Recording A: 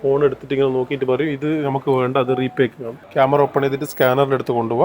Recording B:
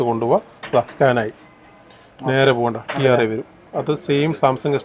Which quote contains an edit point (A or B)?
A